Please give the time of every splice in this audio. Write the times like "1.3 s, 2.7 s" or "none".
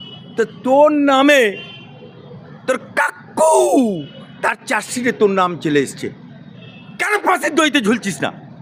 none